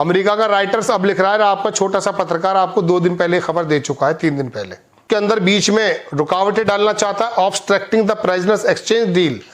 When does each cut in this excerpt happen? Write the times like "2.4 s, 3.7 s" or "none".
5.0 s